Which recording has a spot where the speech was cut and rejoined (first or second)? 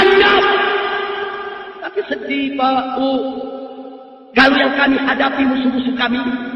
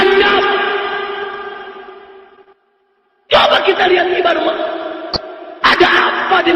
first